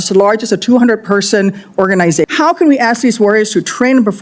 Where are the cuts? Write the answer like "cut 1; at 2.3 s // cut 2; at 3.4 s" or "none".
cut 1; at 2.2 s